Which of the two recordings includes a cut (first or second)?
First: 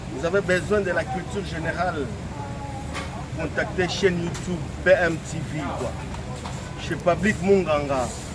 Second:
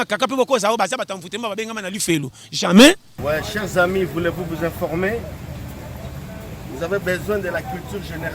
second